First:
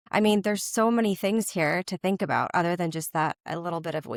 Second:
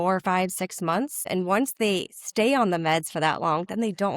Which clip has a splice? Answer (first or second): second